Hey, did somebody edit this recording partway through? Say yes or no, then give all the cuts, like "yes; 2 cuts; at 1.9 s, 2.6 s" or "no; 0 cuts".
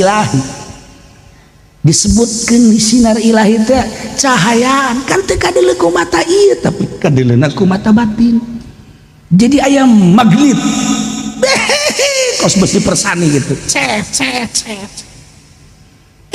no; 0 cuts